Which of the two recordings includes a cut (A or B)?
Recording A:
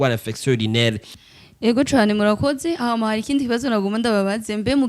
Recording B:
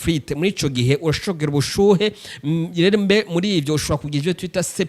A